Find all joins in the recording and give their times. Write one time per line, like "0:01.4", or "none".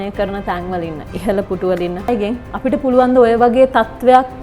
0:02.1